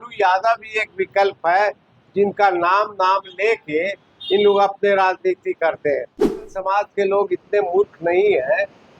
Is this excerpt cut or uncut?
cut